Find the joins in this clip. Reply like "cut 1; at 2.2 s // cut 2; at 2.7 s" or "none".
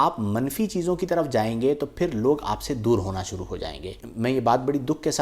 cut 1; at 4.0 s

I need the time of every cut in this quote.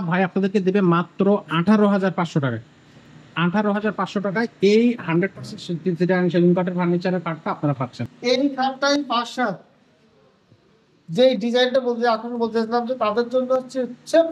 cut 1; at 8.0 s

